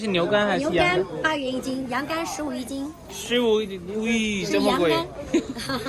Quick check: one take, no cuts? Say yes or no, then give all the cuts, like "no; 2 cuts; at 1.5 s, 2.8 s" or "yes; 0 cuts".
yes; 0 cuts